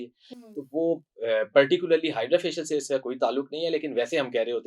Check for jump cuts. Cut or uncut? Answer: uncut